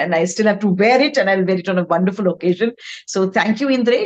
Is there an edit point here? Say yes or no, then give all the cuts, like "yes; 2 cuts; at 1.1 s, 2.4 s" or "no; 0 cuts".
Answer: no; 0 cuts